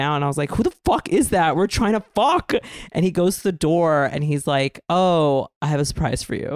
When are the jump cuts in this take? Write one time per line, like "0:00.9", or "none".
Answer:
none